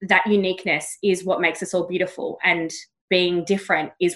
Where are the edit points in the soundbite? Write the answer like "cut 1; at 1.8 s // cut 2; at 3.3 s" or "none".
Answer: none